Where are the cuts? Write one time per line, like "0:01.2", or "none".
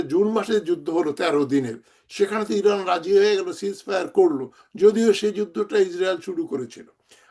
none